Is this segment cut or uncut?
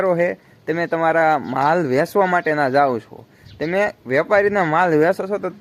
uncut